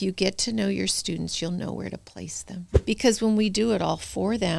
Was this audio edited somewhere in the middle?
yes; 1 cut; at 2.7 s

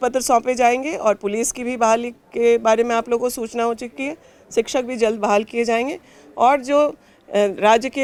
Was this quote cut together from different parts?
no; 0 cuts

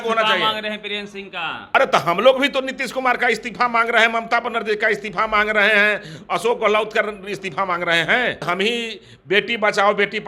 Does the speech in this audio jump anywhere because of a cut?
yes; 2 cuts; at 1.7 s, 8.4 s

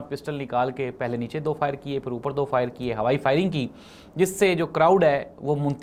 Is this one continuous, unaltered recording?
yes; 0 cuts

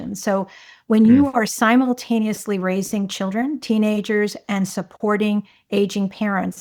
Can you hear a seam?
no; 0 cuts

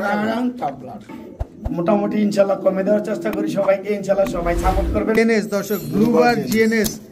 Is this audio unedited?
no; 2 cuts; at 1.1 s, 5.2 s

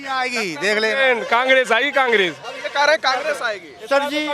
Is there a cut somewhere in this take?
no; 0 cuts

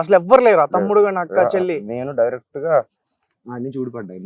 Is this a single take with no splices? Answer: yes; 0 cuts

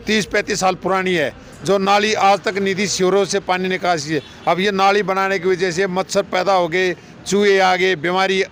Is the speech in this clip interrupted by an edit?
no; 0 cuts

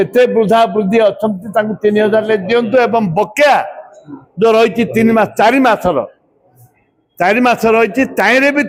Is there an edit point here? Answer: no; 0 cuts

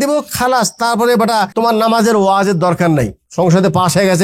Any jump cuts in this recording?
yes; 2 cuts; at 1.5 s, 3.2 s

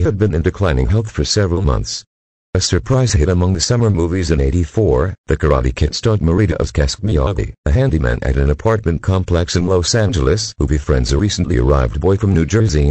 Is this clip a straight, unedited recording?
no; 1 cut; at 3.4 s

